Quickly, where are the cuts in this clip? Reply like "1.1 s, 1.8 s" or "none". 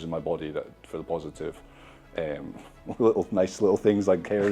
none